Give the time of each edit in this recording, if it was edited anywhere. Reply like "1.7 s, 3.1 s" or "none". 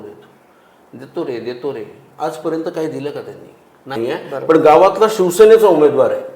4.0 s